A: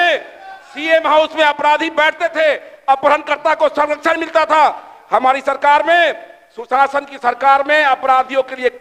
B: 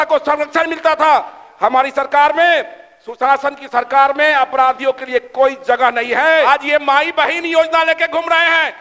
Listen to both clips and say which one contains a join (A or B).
B